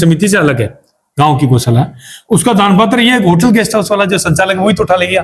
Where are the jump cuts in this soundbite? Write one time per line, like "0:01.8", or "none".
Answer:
none

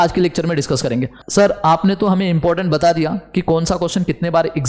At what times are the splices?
0:01.2

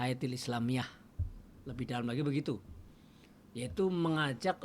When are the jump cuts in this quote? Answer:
none

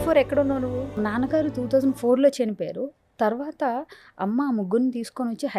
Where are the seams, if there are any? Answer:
0:00.9

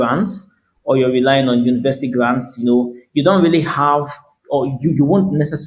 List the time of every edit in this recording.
none

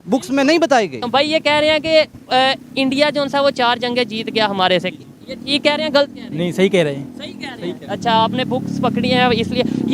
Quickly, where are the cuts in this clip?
0:01.0

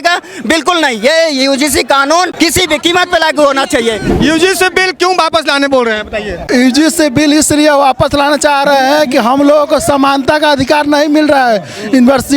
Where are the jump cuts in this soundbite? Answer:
0:02.3
0:04.1
0:06.5

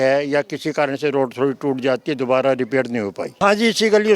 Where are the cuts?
0:03.2

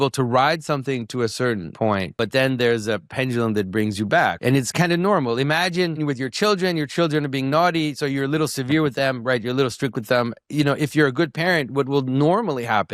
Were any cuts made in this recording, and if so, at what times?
0:02.1
0:04.4
0:06.0

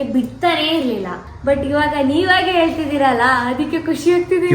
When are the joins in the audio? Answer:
0:01.2

